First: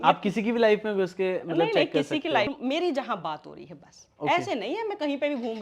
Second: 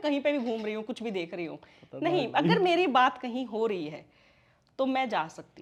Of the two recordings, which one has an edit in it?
first; 1 cut; at 2.5 s

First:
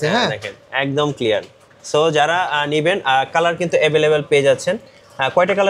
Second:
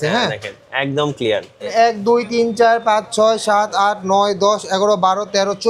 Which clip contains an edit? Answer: second; 1 cut; at 1.7 s

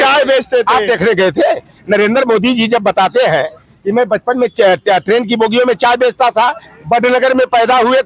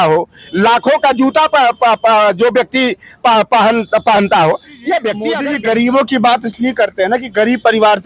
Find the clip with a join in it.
second; 1 cut; at 5.2 s

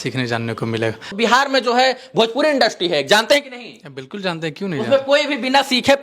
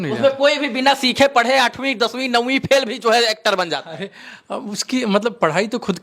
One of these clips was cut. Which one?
first; 1 cut; at 1.1 s

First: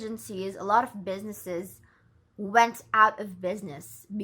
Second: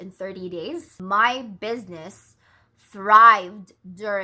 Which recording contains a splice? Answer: second; 1 cut; at 0.9 s

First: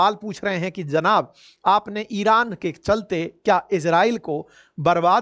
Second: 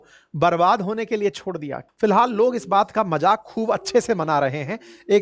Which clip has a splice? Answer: second; 1 cut; at 1.8 s

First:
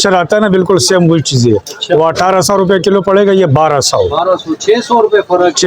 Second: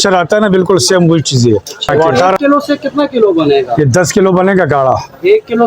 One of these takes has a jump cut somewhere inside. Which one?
second; 1 cut; at 2.2 s

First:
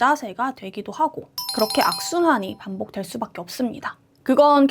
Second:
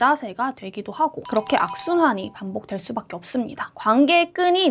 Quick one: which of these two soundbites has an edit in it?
second; 2 cuts; at 1.2 s, 3.7 s

